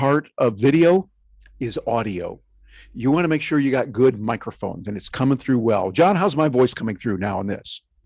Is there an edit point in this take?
no; 0 cuts

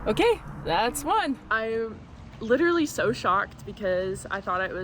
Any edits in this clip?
yes; 1 cut; at 1.5 s

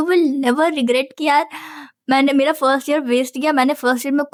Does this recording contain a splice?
no; 0 cuts

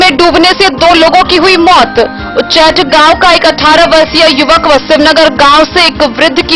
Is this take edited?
no; 0 cuts

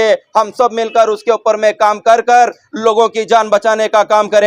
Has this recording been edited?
no; 0 cuts

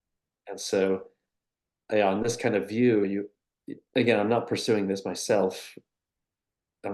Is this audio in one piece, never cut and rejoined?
yes; 0 cuts

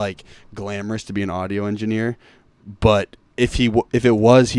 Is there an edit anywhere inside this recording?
no; 0 cuts

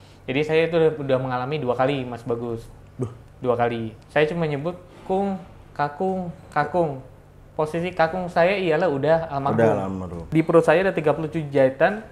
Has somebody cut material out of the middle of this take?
yes; 2 cuts; at 4.0 s, 10.1 s

